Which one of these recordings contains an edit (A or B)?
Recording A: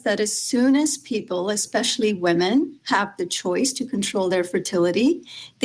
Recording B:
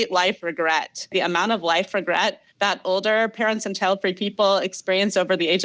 B